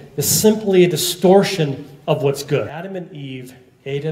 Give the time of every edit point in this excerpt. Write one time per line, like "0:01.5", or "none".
0:02.8